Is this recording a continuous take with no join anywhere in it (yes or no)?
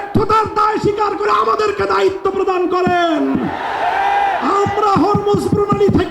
yes